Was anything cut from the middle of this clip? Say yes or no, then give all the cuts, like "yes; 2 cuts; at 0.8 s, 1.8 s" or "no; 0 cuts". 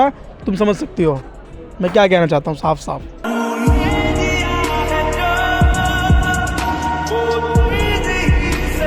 no; 0 cuts